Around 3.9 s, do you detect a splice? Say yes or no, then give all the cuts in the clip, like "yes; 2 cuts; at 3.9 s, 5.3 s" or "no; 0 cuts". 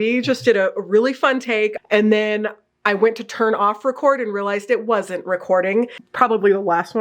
no; 2 cuts; at 1.8 s, 6.0 s